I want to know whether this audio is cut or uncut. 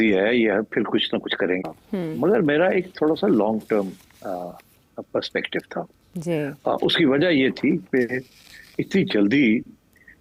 uncut